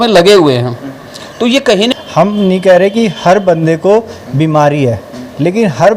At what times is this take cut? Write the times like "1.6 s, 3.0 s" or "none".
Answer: 1.9 s